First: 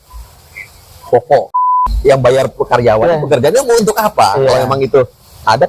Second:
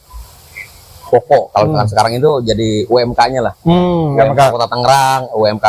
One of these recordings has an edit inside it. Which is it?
first; 1 cut; at 1.5 s

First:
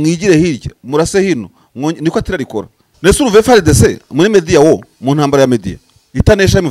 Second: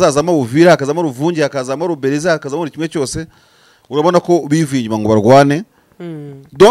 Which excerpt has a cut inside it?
first; 1 cut; at 2.8 s

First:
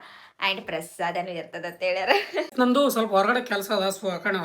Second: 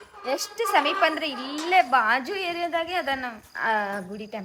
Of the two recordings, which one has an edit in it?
first; 1 cut; at 2.5 s

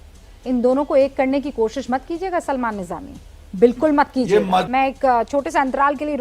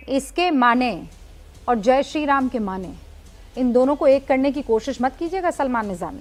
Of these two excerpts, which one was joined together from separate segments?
first; 1 cut; at 4.7 s

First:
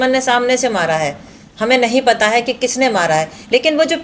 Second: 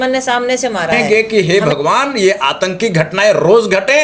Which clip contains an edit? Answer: second; 1 cut; at 1.0 s

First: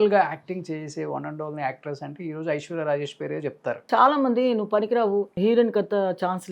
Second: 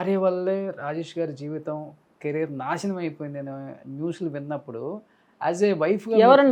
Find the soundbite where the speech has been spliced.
first; 2 cuts; at 3.8 s, 5.3 s

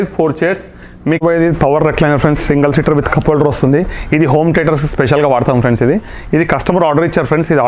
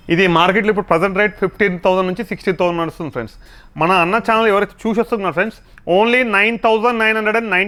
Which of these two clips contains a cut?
first; 1 cut; at 1.2 s

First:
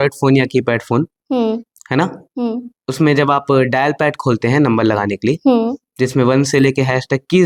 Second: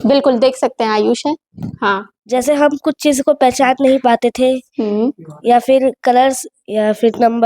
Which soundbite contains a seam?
second; 1 cut; at 2.1 s

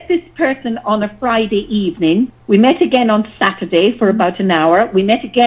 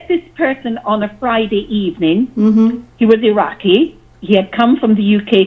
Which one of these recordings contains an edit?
first; 1 cut; at 2.3 s

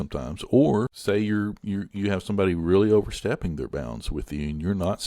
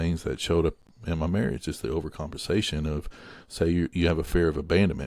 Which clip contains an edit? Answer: first; 1 cut; at 0.9 s

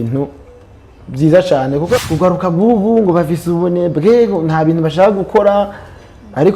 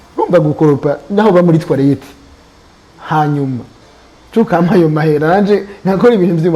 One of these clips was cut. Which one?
first; 1 cut; at 1.9 s

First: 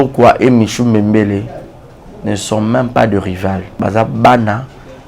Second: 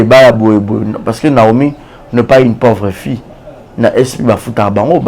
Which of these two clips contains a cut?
first; 1 cut; at 3.7 s

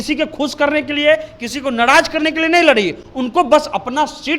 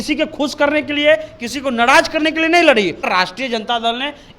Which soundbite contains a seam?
second; 1 cut; at 3.1 s

